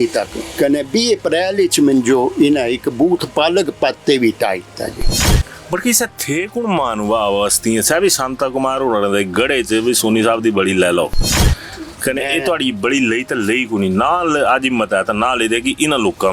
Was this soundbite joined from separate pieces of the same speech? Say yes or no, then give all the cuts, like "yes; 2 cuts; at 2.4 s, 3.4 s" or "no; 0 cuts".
no; 0 cuts